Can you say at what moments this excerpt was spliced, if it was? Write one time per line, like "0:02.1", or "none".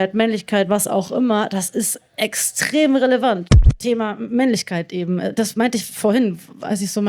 0:03.6